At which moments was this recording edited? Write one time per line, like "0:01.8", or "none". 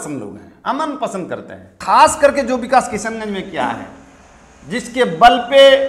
0:01.8